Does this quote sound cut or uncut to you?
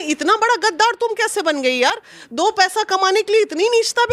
uncut